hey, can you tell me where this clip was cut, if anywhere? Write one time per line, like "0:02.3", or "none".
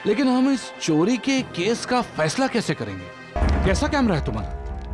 0:03.4